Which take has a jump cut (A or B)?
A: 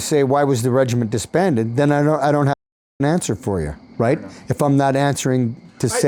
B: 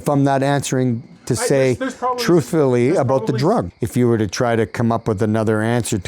B